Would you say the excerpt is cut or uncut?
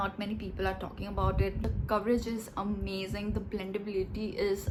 uncut